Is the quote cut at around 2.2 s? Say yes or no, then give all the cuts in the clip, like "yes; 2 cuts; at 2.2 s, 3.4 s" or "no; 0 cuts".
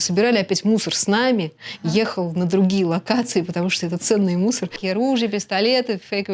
no; 1 cut; at 4.8 s